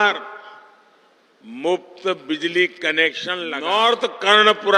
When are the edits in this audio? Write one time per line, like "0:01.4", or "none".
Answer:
0:03.5